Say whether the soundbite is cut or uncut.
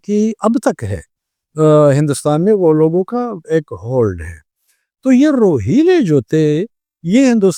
uncut